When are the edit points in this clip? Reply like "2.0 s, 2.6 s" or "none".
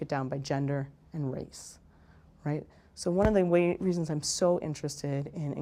none